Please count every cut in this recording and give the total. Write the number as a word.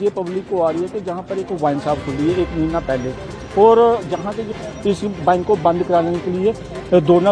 one